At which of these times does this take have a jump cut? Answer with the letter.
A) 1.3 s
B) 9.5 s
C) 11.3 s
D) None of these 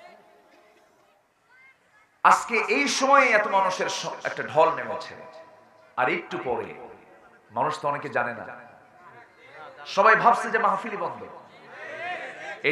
A